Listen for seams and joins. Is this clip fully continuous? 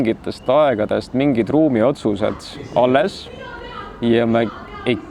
yes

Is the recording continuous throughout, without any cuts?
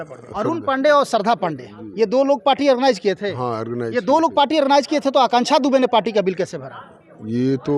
yes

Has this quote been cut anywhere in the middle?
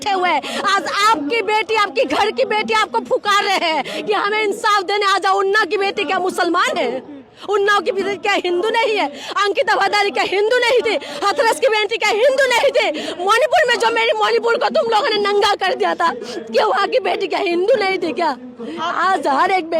no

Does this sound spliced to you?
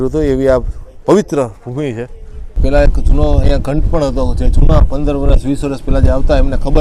yes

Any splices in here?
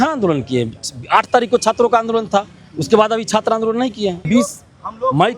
yes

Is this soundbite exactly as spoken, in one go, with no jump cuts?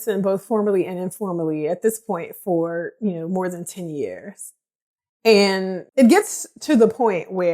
no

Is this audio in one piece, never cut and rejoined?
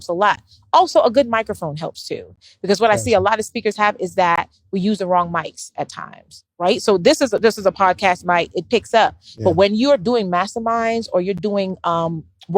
no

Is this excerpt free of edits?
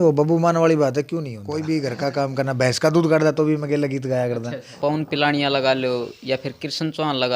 no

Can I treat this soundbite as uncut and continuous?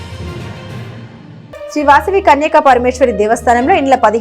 yes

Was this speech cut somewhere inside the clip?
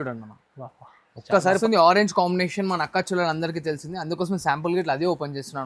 yes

